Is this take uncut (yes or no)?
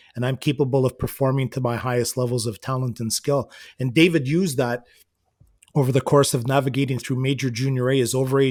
yes